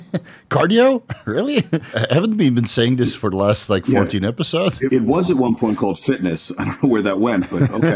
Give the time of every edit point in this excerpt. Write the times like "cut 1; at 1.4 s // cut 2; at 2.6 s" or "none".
cut 1; at 2.0 s // cut 2; at 4.9 s